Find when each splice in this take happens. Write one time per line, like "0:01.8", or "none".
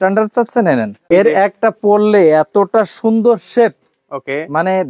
0:01.0